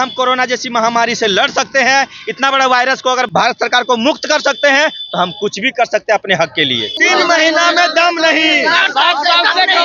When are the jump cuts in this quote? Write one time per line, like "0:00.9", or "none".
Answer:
0:03.3
0:07.0